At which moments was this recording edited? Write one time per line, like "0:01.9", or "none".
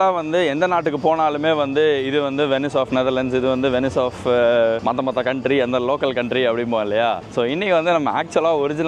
0:04.8
0:07.2